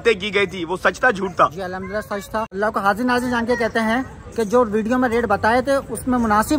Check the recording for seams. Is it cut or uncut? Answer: cut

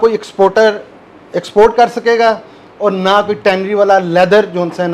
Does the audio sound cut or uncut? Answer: uncut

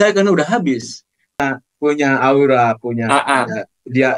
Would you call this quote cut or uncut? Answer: cut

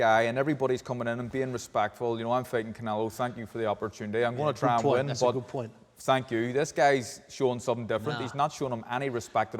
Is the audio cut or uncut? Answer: uncut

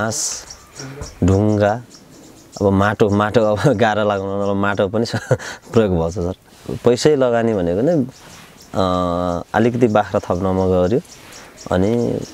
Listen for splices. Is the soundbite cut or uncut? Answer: cut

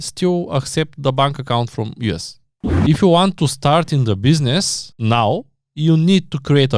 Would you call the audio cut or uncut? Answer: cut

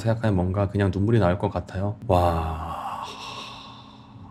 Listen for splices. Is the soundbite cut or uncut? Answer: uncut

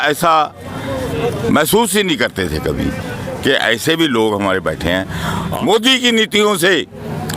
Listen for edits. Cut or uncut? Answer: cut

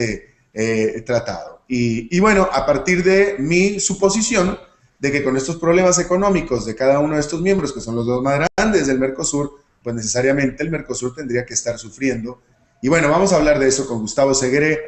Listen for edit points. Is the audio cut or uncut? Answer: uncut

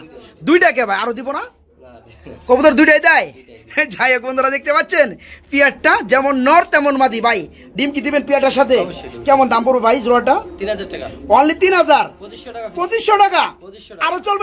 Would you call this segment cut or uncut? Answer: uncut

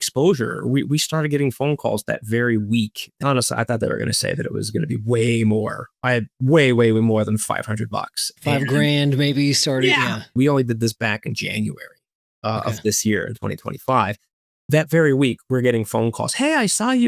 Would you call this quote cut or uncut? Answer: cut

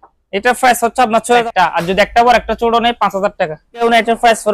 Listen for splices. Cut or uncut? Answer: cut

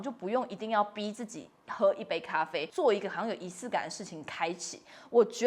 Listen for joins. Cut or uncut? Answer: cut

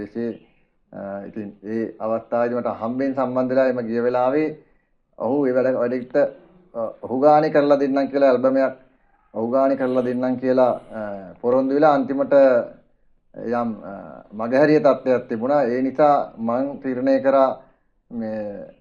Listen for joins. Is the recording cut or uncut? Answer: uncut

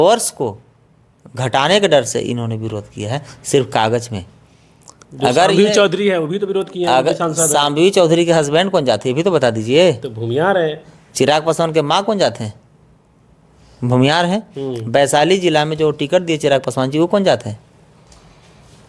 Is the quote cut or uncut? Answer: uncut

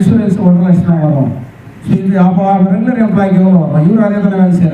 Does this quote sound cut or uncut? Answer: cut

